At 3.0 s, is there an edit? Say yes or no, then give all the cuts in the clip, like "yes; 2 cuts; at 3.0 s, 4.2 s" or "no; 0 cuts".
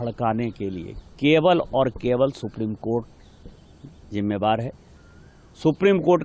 no; 0 cuts